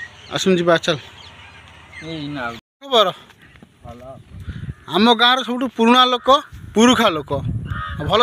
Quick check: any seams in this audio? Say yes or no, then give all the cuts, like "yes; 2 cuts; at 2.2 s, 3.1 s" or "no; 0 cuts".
no; 0 cuts